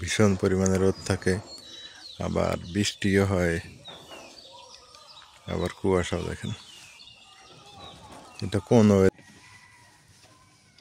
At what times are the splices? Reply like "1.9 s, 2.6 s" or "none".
9.1 s